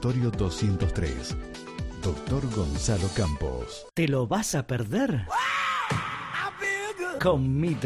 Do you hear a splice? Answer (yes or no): yes